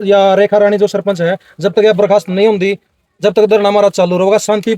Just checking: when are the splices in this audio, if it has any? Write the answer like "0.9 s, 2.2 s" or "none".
none